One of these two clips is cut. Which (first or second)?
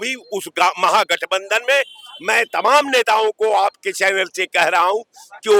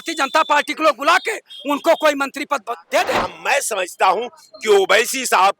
second